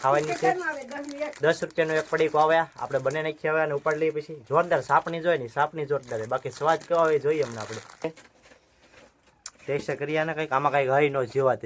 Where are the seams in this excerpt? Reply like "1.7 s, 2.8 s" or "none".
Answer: 8.0 s